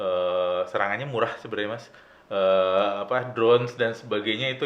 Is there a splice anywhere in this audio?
no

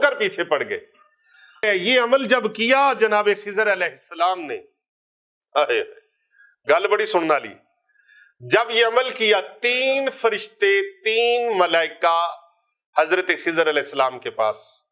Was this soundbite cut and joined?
yes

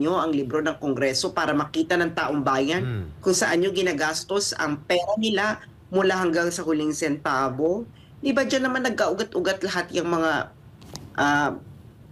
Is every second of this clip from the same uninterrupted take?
yes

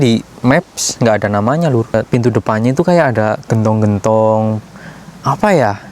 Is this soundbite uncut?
no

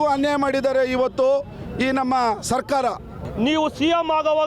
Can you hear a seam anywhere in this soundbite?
yes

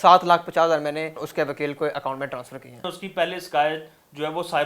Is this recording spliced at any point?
yes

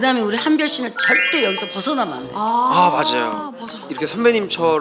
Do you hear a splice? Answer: yes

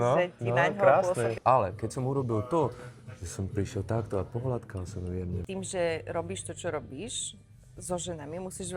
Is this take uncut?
no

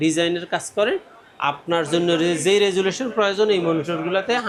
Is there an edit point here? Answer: no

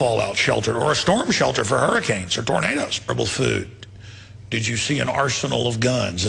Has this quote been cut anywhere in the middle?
no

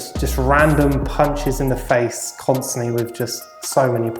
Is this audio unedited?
yes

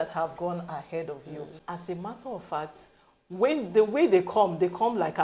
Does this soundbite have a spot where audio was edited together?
yes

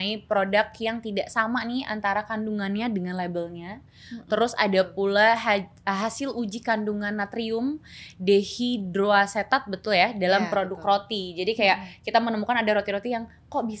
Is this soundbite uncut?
yes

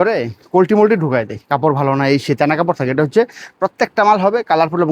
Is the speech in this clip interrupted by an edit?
no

